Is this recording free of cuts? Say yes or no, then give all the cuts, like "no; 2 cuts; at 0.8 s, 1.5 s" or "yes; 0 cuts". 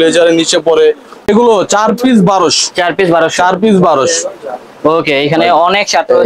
no; 1 cut; at 1.1 s